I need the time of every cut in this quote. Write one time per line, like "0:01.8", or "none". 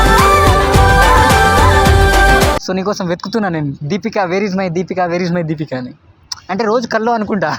0:02.6

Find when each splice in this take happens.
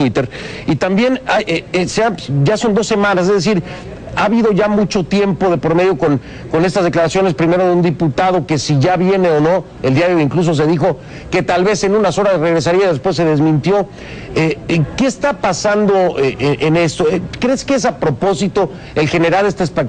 0:16.5

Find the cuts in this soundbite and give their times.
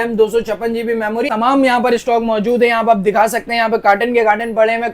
0:01.3

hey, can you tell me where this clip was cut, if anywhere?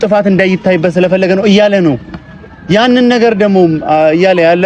none

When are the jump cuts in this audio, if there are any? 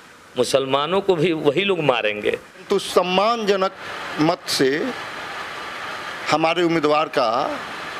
0:02.6

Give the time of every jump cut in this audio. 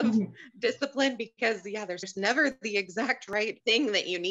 0:02.0
0:03.2

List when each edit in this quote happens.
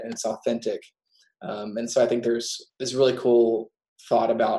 0:02.6

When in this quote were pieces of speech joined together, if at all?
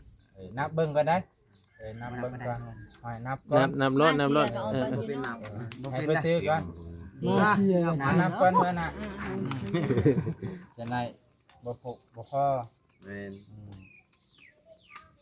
none

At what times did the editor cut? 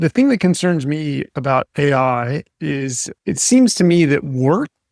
none

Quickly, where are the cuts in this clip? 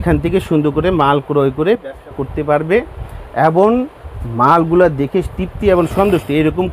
none

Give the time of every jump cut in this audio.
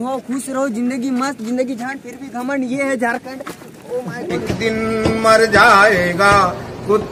none

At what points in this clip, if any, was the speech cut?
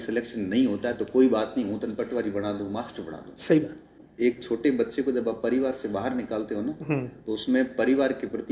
0:04.0

